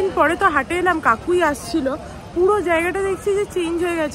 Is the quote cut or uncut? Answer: uncut